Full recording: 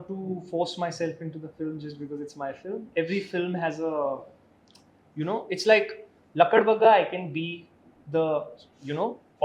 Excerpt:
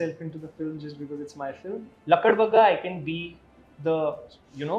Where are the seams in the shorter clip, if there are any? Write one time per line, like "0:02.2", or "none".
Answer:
0:01.8